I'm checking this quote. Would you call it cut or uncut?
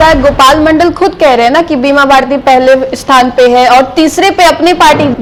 uncut